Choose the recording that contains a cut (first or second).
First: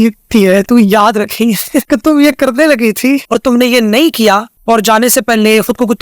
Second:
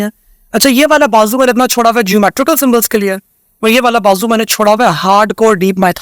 first